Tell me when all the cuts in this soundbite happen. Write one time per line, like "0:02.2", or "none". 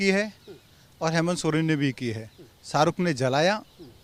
none